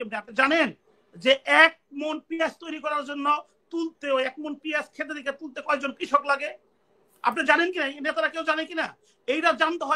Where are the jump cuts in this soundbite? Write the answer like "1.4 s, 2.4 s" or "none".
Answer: none